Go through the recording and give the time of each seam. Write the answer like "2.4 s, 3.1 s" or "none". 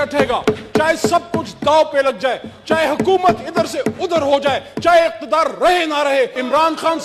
none